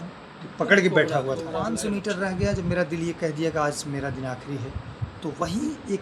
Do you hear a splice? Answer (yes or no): yes